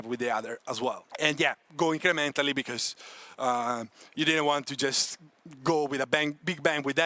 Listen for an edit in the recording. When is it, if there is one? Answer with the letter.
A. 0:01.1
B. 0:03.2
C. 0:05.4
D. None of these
A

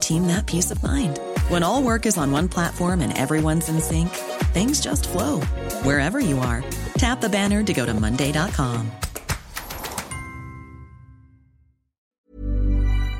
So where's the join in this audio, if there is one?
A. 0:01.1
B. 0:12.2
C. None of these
B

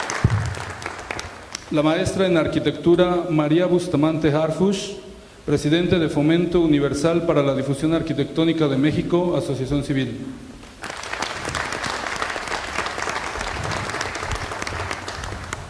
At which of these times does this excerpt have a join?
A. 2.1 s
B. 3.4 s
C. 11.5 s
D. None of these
A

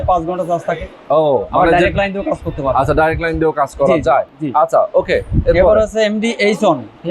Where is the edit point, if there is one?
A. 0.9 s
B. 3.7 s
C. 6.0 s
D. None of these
D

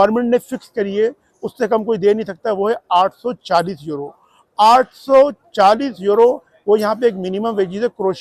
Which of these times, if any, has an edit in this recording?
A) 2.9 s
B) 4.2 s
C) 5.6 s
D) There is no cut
D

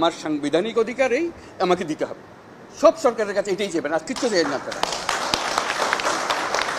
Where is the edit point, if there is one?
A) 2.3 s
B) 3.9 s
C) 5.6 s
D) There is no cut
D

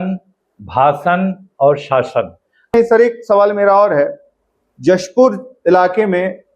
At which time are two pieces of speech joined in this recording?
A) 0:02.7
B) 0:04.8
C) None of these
A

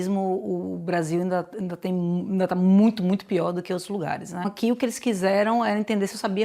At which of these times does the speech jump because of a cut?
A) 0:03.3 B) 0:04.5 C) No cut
B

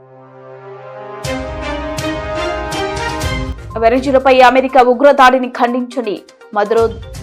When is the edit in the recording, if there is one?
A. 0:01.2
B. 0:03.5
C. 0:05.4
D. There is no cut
B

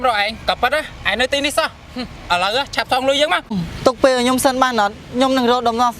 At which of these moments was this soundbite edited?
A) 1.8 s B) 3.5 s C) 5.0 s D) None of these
B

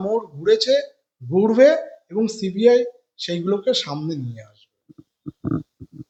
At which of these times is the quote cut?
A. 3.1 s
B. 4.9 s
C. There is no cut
C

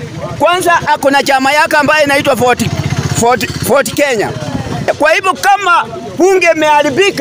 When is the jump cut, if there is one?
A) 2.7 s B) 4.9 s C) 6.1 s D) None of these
B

